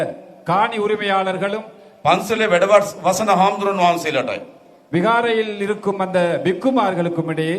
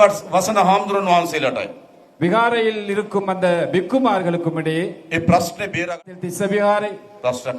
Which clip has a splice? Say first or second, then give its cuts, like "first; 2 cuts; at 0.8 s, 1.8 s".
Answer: second; 1 cut; at 5.9 s